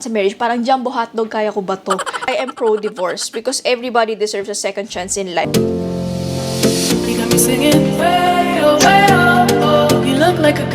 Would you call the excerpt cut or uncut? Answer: cut